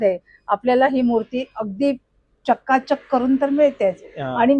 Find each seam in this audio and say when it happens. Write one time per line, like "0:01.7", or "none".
none